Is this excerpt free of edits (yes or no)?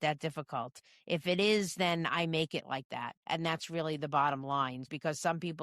no